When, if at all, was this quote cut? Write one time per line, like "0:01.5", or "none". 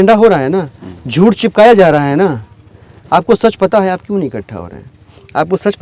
none